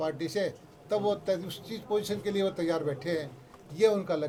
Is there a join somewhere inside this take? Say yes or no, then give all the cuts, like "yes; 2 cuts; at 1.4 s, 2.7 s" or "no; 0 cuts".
no; 0 cuts